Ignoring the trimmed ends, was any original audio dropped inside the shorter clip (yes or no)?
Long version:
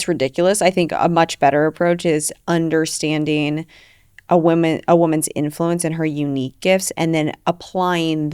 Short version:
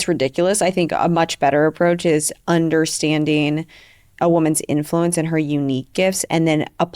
yes